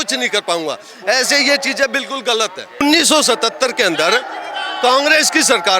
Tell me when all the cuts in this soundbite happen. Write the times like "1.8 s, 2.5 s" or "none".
2.8 s